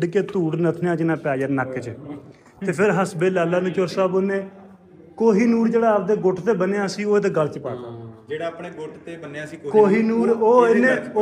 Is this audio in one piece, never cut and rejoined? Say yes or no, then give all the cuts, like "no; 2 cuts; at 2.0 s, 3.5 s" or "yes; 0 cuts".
yes; 0 cuts